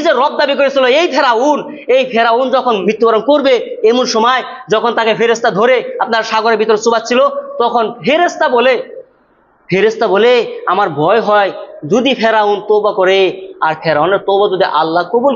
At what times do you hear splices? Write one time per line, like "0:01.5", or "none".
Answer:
0:02.8